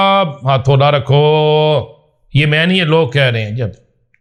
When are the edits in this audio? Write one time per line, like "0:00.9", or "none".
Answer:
none